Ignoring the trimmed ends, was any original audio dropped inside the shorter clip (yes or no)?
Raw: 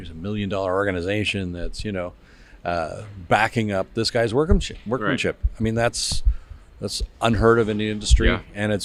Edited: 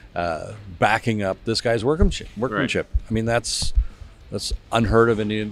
no